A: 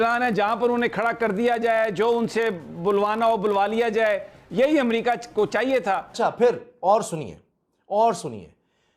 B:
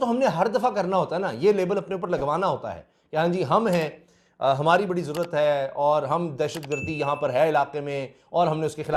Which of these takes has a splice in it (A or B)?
A